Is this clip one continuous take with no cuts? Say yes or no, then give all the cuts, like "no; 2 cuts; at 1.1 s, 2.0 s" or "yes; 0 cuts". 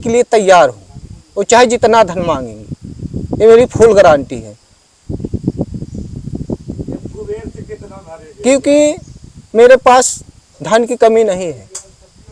yes; 0 cuts